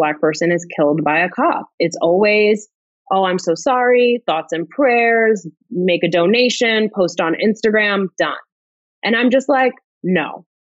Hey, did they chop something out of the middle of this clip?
no; 0 cuts

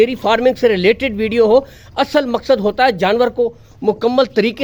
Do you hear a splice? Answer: no; 0 cuts

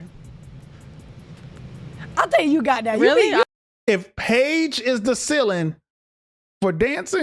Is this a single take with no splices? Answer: no; 1 cut; at 3.4 s

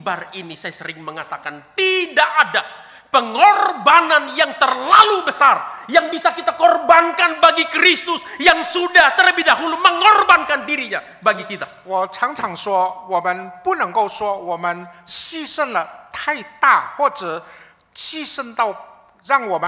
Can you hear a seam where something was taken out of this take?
no; 0 cuts

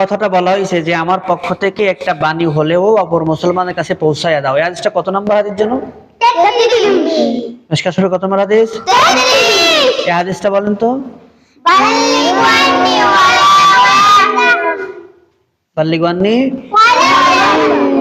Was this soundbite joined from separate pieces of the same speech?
no; 0 cuts

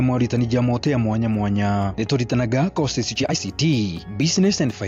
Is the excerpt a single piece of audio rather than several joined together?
no; 1 cut; at 3.3 s

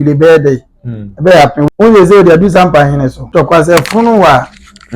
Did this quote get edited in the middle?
yes; 2 cuts; at 1.7 s, 3.3 s

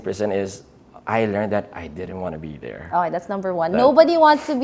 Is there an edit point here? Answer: no; 0 cuts

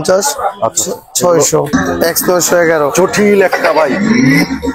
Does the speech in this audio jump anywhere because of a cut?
yes; 1 cut; at 1.7 s

